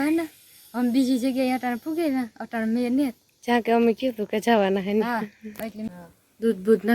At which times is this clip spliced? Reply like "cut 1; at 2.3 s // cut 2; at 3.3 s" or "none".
cut 1; at 5.8 s